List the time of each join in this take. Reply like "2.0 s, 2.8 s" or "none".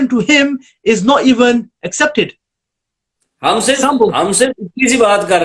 none